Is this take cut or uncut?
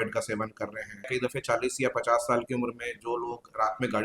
cut